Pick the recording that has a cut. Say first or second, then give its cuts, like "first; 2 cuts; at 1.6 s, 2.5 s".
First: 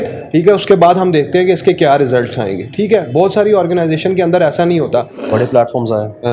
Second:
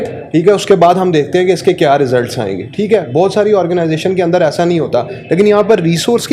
first; 1 cut; at 5.1 s